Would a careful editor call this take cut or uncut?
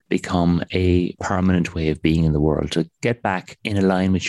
cut